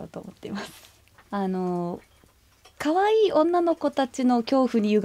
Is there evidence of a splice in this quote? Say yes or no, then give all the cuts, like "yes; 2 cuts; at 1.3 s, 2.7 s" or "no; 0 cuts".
yes; 1 cut; at 1.1 s